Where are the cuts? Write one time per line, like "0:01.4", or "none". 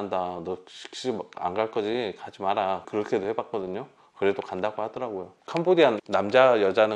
0:05.3